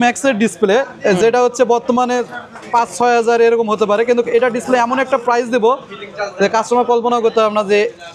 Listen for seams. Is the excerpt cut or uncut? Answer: uncut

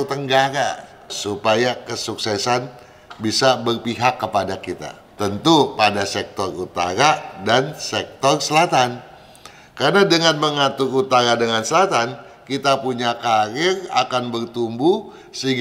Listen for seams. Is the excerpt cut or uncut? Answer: cut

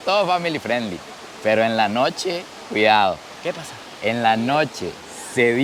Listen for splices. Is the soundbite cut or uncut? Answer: uncut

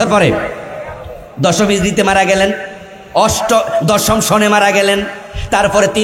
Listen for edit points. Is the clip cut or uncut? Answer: uncut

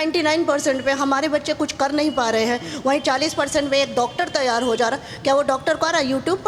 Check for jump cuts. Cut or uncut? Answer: uncut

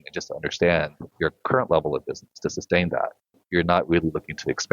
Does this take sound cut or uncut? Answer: cut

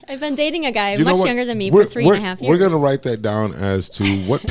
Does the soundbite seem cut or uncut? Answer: uncut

